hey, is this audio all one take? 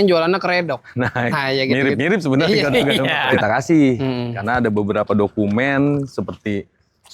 no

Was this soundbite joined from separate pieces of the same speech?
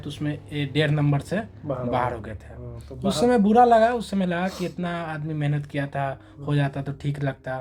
no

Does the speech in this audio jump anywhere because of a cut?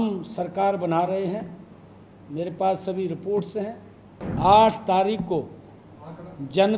yes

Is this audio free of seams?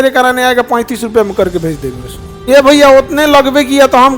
no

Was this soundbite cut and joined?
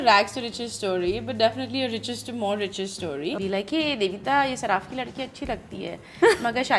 yes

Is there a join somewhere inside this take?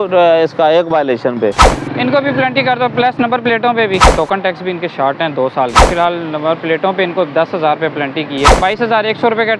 yes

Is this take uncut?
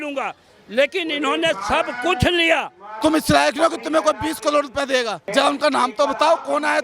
no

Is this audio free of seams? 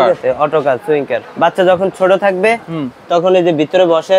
no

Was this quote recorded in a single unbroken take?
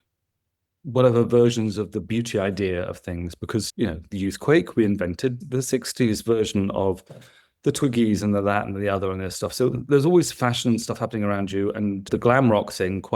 yes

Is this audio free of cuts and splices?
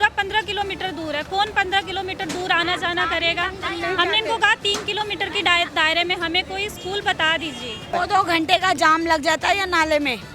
no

